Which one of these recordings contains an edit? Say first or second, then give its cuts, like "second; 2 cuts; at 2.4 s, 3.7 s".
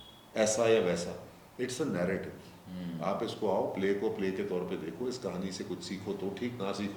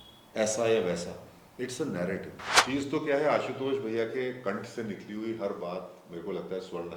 second; 1 cut; at 2.5 s